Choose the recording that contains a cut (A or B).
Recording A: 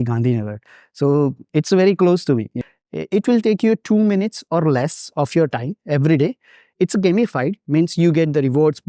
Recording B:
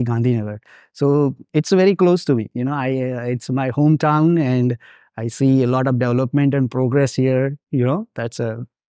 A